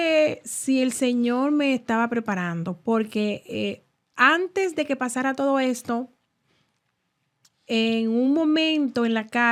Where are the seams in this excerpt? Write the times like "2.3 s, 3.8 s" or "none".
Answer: none